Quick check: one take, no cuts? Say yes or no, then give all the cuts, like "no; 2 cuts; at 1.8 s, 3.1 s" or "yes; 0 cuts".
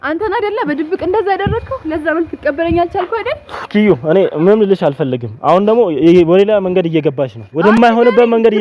yes; 0 cuts